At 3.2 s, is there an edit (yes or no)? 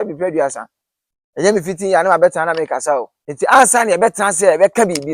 yes